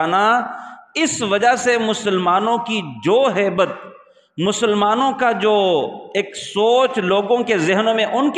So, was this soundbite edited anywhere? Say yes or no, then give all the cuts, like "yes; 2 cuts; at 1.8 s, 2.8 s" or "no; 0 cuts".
no; 0 cuts